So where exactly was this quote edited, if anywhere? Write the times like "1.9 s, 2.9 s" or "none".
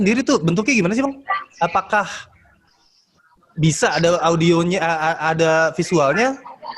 none

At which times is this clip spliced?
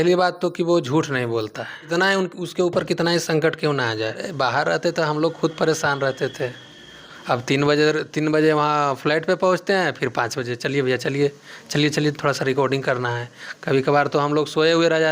1.8 s, 4.3 s

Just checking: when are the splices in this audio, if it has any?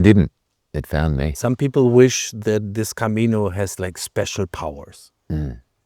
1.3 s

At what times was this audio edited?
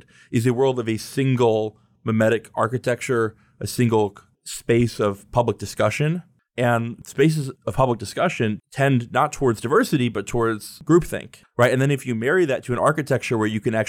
6.4 s, 7.2 s, 11.0 s

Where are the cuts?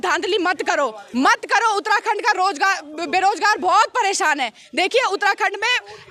none

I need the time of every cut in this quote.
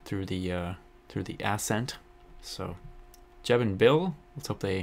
2.5 s

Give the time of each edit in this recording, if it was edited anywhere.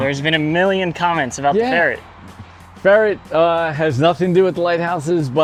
none

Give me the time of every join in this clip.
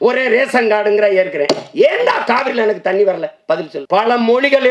3.7 s

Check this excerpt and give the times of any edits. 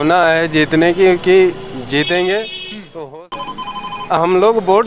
3.3 s

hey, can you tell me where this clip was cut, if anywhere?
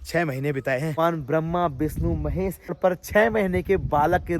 0.9 s, 2.8 s

